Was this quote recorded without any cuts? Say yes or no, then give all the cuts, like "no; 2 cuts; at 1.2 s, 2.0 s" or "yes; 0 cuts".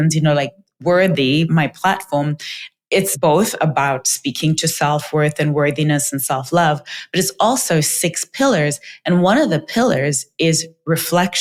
yes; 0 cuts